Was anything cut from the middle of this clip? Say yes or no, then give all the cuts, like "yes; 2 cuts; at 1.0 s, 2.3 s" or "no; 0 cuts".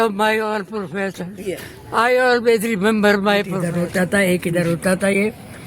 yes; 1 cut; at 3.6 s